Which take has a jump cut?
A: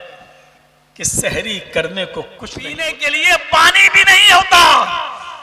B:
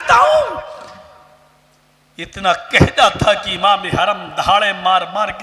A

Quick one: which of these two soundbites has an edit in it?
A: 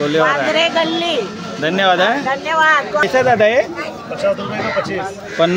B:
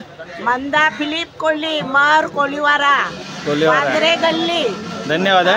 A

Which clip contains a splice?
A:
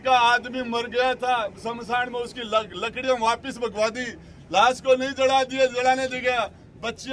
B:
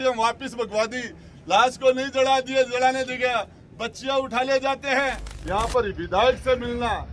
B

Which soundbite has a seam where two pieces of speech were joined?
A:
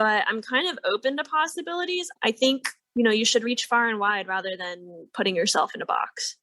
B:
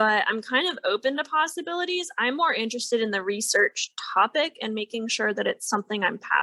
A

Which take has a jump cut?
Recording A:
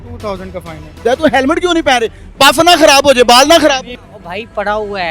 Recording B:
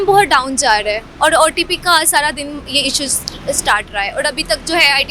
A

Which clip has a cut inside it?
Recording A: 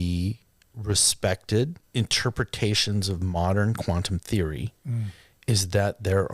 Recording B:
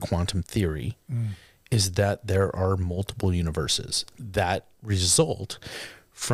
A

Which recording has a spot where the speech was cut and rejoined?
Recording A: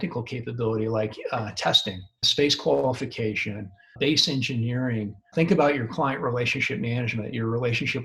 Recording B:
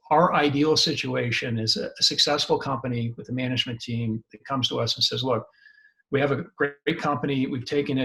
A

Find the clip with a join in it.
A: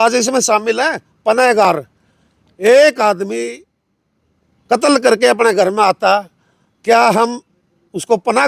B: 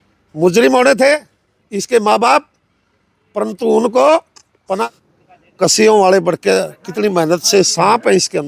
B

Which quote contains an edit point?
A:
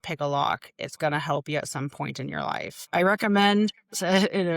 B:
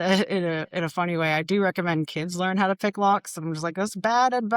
A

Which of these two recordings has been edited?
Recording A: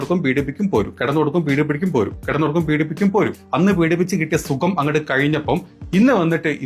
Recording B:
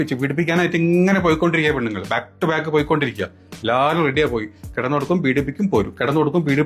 A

